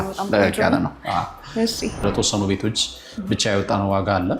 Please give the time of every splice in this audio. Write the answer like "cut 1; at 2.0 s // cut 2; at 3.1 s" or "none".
cut 1; at 2.0 s